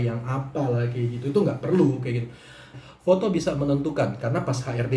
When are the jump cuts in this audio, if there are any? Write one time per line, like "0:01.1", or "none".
0:02.7